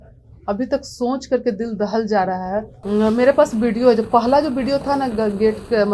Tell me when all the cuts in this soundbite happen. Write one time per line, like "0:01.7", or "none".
0:02.7